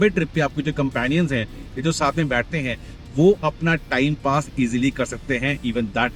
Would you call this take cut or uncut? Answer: uncut